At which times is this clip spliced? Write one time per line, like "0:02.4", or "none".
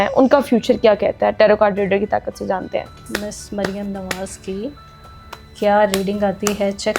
0:03.0